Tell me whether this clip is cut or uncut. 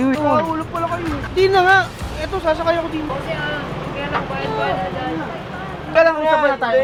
uncut